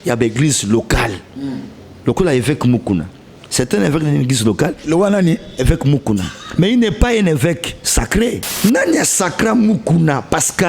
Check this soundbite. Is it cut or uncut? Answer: cut